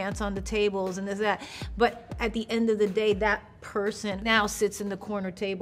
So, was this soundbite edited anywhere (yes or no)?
yes